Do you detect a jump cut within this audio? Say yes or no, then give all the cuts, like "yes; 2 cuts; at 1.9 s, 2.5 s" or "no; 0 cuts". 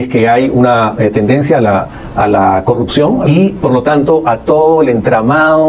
yes; 1 cut; at 3.2 s